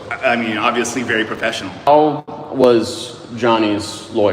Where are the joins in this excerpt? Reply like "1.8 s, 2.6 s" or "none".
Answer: 1.8 s